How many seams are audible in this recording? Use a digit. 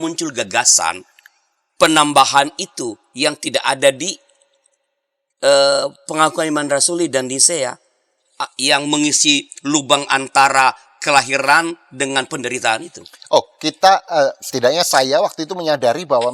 0